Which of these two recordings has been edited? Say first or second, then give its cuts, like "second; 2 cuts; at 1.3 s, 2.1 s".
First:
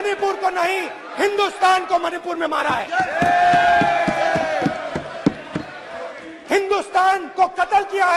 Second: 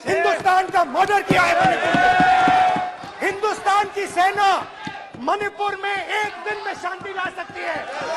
second; 1 cut; at 2.8 s